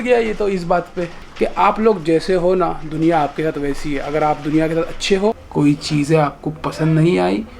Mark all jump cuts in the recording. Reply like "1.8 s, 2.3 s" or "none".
1.1 s, 5.4 s